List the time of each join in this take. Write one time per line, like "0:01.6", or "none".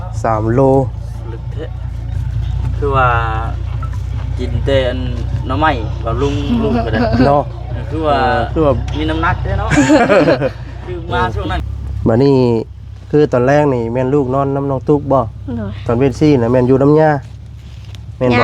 0:11.6